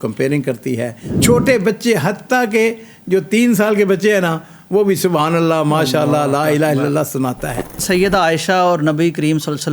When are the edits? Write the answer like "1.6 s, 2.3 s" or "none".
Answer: 1.1 s, 7.8 s